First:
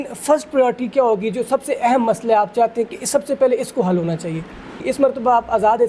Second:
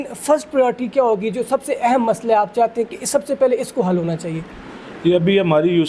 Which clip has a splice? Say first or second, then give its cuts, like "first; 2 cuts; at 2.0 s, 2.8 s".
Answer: first; 1 cut; at 4.7 s